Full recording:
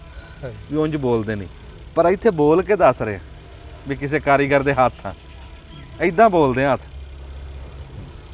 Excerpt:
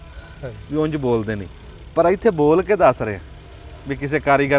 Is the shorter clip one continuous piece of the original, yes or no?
yes